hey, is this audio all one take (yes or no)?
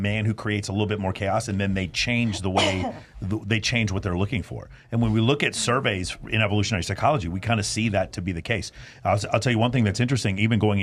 yes